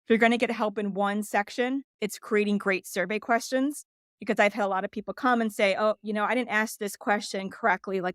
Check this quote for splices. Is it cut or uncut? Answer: cut